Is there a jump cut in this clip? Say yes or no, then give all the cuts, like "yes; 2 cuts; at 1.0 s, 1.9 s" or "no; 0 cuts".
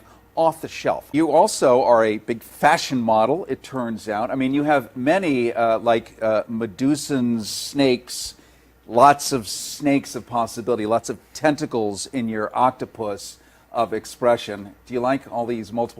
yes; 1 cut; at 10.1 s